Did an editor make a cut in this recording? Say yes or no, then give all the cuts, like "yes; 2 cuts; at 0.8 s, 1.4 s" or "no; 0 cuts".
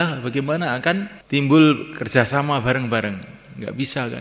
yes; 1 cut; at 1.2 s